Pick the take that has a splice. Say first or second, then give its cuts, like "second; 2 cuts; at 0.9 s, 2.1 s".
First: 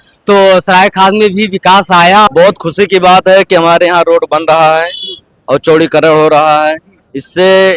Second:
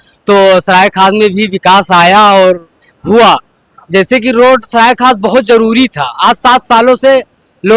first; 1 cut; at 2.3 s